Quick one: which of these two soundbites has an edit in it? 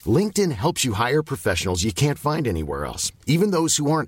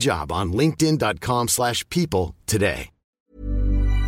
second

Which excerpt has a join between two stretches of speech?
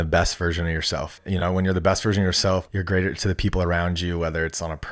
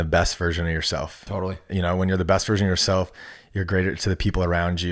first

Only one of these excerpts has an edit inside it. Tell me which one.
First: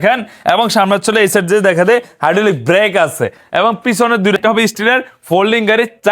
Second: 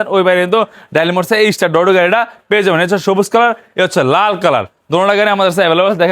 first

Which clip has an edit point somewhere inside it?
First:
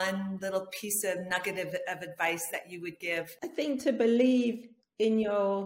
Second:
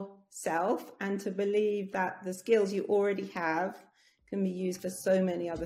first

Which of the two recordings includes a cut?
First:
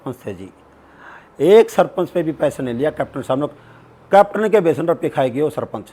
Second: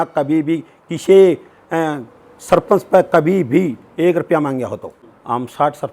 second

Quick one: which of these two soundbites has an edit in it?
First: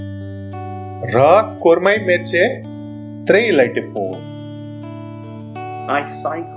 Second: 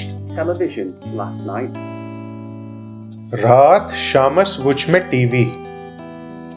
first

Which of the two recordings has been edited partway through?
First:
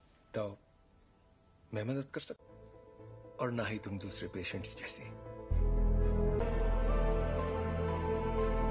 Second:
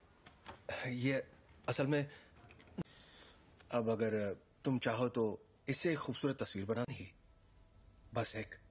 first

